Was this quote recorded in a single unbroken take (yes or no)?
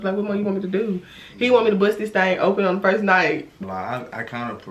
no